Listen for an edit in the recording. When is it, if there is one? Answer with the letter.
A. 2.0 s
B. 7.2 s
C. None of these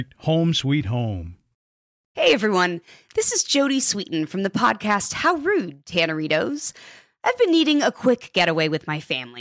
A